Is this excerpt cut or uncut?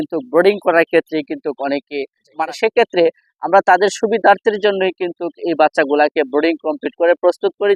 cut